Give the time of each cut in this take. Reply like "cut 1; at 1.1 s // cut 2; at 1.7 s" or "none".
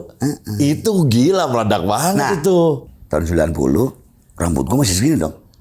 cut 1; at 2.8 s